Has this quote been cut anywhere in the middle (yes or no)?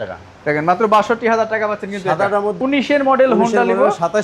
yes